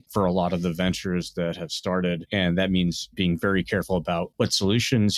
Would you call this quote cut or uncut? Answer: cut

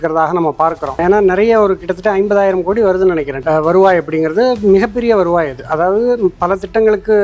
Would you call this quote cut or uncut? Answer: cut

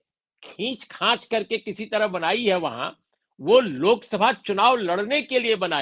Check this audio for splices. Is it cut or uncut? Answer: uncut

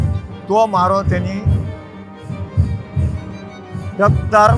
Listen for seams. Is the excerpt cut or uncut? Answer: uncut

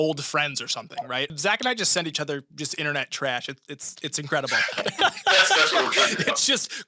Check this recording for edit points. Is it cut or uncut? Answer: cut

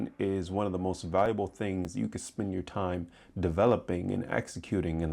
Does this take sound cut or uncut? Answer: uncut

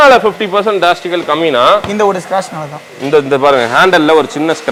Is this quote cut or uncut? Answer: uncut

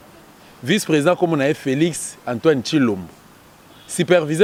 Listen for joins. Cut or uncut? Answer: uncut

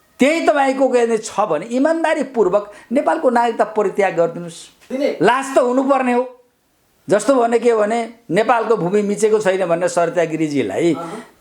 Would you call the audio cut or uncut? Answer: cut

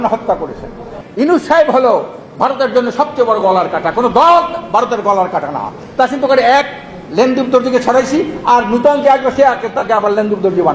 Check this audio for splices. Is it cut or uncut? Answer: cut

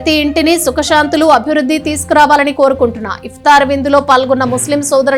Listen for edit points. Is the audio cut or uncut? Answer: uncut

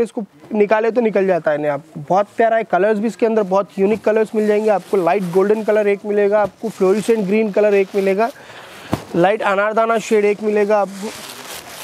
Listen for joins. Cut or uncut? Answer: uncut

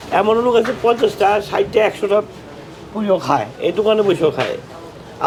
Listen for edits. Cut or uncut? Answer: uncut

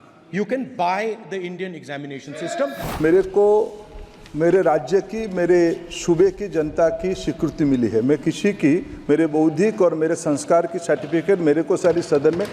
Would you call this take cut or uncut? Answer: cut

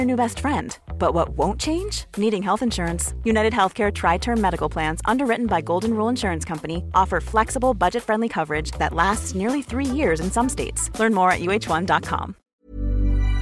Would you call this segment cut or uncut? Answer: cut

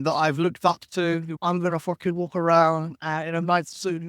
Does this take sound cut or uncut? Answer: cut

